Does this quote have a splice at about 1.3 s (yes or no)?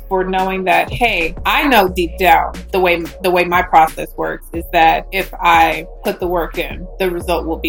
yes